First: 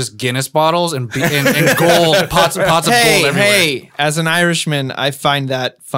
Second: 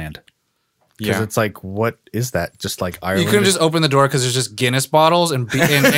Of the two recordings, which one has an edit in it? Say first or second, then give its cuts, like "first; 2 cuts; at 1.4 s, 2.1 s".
second; 1 cut; at 3.1 s